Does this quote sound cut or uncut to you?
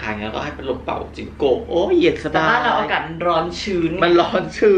uncut